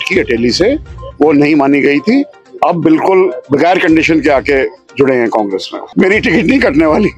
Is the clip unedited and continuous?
no; 1 cut; at 5.9 s

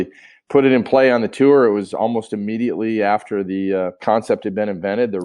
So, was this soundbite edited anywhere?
yes; 1 cut; at 4.0 s

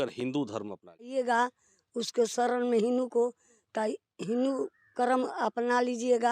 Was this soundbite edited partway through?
yes; 1 cut; at 1.1 s

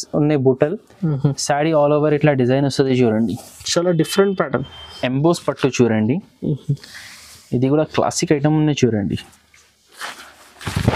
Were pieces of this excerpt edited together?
yes; 1 cut; at 4.9 s

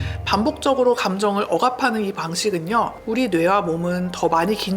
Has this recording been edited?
yes; 1 cut; at 3.1 s

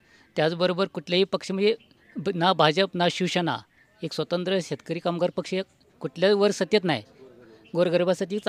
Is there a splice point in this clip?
no; 0 cuts

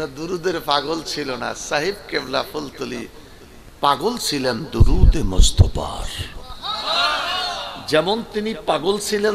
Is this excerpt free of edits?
yes; 0 cuts

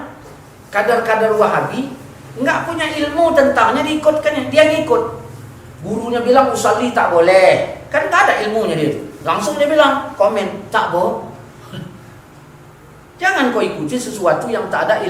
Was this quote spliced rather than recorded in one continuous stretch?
no; 0 cuts

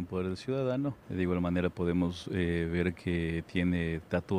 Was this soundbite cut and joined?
yes; 1 cut; at 1.0 s

